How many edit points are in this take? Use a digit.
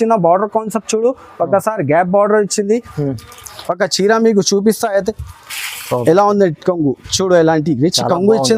0